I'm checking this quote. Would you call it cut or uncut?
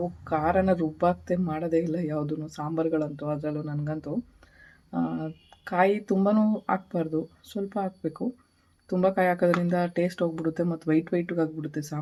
uncut